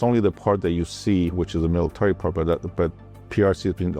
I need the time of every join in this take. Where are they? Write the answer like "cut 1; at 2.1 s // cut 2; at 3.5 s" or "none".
none